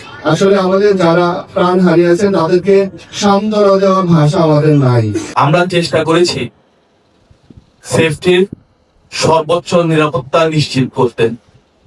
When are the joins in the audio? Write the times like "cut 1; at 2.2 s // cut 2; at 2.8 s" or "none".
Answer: cut 1; at 5.2 s